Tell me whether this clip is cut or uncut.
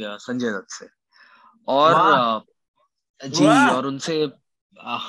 uncut